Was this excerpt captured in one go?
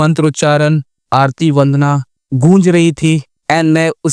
yes; 0 cuts

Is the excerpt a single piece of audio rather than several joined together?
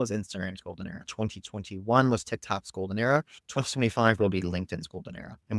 yes; 0 cuts

